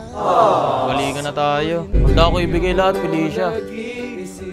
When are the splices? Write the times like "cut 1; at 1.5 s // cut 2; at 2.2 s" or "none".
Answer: cut 1; at 1.9 s